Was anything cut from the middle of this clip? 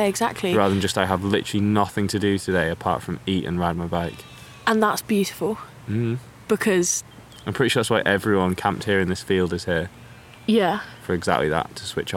no; 0 cuts

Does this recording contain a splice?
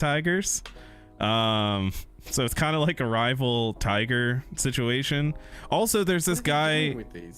no; 0 cuts

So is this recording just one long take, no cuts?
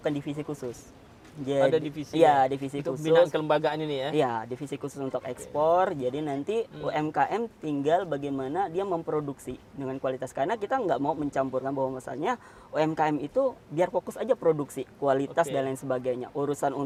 yes; 0 cuts

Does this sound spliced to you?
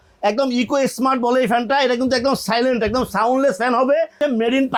no; 0 cuts

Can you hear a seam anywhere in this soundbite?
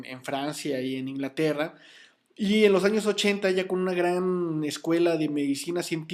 yes; 1 cut; at 2.9 s

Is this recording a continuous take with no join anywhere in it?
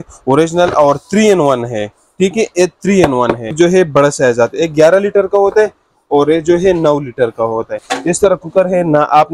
no; 2 cuts; at 3.5 s, 7.8 s

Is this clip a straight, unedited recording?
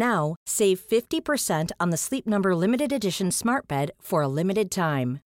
yes; 0 cuts

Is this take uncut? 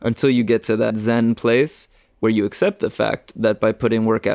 no; 1 cut; at 1.0 s

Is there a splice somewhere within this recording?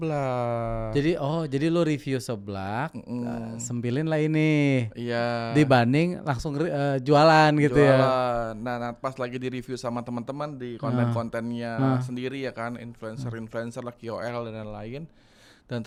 no; 0 cuts

